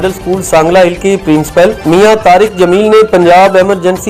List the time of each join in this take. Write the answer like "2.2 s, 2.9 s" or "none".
none